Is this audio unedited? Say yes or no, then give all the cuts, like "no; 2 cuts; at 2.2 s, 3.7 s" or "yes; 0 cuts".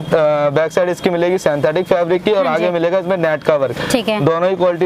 yes; 0 cuts